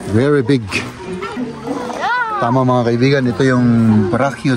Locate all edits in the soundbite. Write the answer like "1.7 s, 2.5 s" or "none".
1.4 s